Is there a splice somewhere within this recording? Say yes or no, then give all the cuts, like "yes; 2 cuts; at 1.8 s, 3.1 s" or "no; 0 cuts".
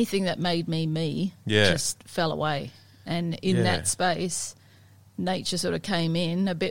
no; 0 cuts